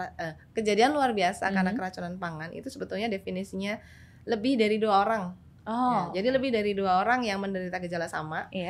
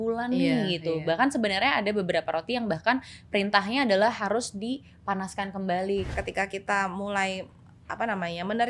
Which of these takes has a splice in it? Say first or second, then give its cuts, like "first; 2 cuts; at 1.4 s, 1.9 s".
second; 1 cut; at 6.1 s